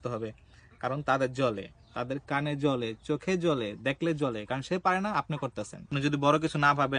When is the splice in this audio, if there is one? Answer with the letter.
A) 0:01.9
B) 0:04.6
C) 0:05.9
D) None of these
C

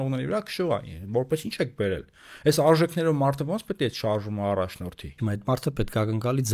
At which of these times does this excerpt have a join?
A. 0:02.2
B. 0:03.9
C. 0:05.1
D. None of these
C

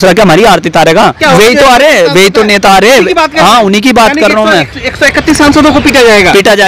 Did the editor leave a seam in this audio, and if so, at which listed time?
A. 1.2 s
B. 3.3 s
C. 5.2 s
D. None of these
A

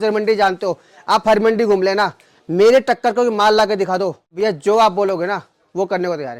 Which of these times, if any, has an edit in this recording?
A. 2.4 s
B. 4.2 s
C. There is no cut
B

